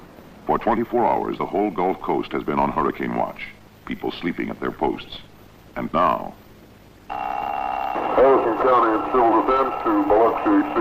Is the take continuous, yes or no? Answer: no